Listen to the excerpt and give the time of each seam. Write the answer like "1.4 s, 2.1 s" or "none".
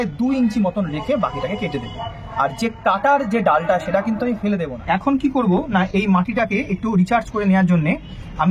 4.7 s